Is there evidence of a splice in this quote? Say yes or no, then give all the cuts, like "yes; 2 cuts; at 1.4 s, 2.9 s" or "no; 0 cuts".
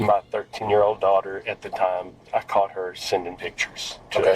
yes; 1 cut; at 2.2 s